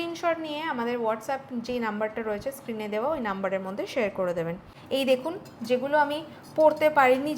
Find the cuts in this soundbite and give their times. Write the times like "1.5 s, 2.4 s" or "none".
4.7 s

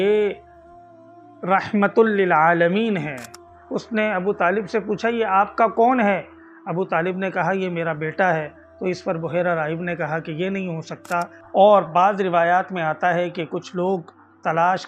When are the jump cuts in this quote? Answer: 3.5 s, 11.4 s

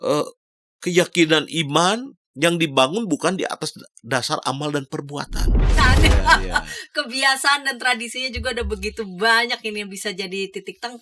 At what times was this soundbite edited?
5.7 s

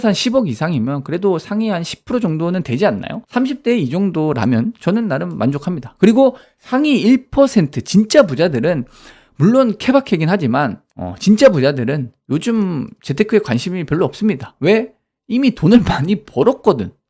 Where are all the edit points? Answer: 3.1 s

